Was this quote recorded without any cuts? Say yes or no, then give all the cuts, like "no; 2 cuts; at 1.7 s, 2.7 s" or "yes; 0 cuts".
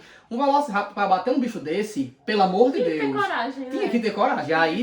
yes; 0 cuts